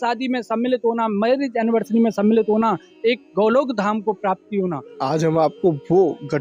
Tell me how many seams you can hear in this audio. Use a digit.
1